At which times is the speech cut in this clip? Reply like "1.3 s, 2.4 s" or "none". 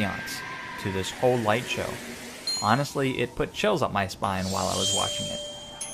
2.8 s